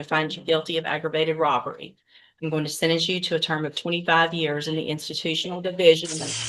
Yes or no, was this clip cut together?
no